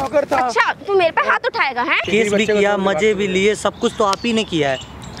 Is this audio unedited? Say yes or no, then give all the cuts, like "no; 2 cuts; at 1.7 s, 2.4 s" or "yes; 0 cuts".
no; 1 cut; at 2.0 s